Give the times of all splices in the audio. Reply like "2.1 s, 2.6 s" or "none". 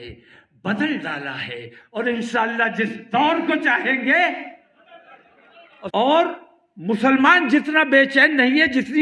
5.9 s